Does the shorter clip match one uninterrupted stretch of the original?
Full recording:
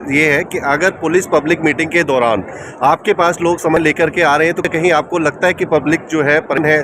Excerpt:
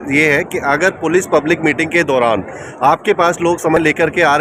yes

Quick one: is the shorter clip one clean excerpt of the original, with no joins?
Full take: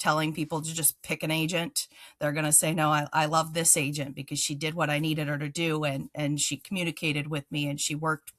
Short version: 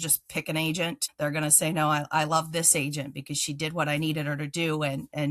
no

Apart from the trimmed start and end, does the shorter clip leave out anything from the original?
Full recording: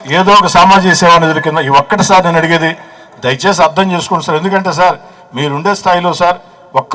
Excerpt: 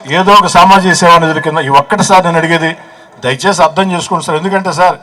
no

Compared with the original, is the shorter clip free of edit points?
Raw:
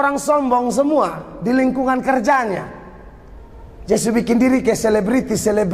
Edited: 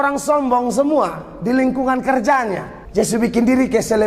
no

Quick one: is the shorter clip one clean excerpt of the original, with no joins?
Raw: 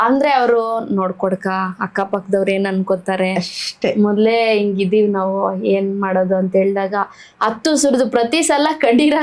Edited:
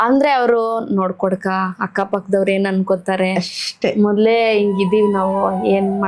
yes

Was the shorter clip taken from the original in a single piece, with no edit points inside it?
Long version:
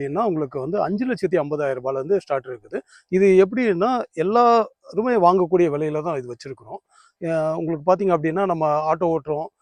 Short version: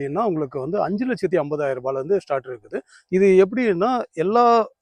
yes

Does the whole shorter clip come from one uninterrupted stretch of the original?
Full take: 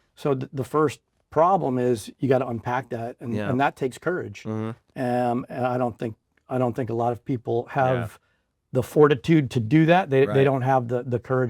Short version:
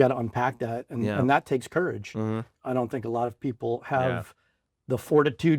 no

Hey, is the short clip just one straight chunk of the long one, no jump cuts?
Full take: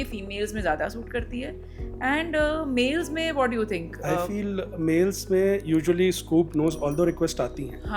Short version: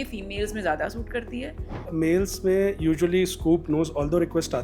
no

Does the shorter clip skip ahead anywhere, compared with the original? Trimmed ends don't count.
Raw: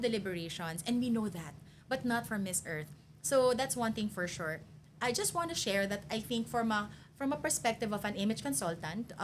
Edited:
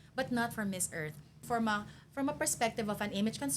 yes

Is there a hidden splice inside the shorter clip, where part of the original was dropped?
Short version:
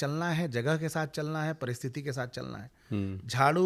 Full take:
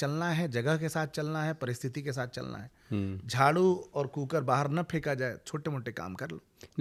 no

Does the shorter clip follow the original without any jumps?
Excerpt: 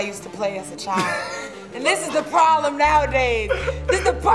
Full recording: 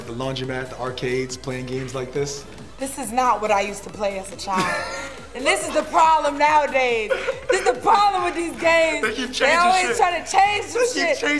yes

